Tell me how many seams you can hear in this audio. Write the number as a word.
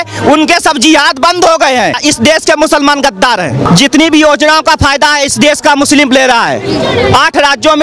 two